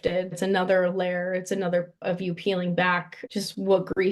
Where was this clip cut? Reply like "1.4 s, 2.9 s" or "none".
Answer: 2.0 s, 3.2 s